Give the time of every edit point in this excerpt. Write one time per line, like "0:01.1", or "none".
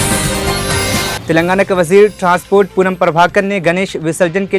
0:01.2